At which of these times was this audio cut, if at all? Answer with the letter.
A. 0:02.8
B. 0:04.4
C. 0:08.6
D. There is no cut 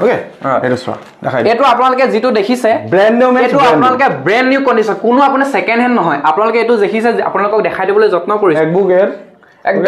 C